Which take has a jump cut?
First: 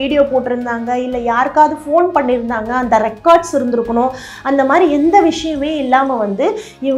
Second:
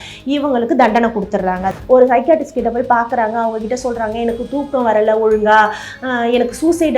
second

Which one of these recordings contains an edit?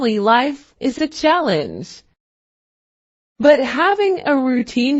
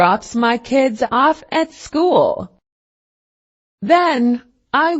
second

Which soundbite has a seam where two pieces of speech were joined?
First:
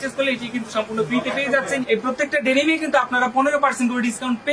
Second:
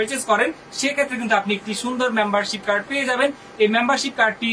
first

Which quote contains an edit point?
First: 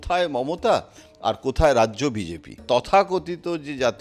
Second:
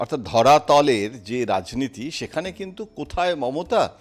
first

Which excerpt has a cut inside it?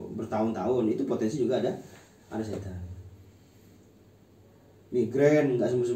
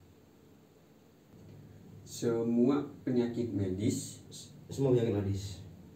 second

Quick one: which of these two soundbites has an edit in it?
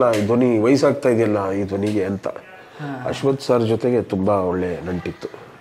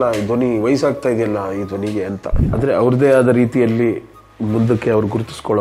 second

